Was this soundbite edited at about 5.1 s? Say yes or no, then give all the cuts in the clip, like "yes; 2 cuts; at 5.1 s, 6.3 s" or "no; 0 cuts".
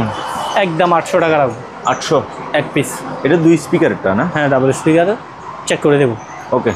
no; 0 cuts